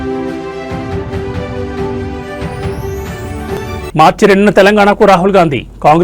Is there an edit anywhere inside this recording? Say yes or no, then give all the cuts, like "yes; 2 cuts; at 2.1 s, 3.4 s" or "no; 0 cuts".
no; 0 cuts